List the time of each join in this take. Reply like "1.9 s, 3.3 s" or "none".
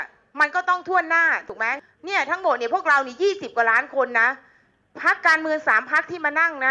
1.6 s